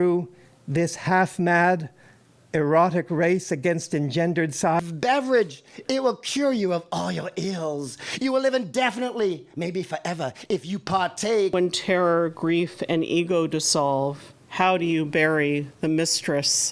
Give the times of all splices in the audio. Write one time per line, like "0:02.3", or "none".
0:04.8
0:11.5